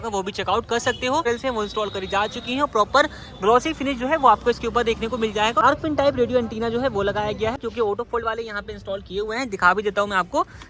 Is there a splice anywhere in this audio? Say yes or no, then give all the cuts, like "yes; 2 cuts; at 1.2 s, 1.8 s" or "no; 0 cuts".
yes; 3 cuts; at 1.2 s, 5.6 s, 7.6 s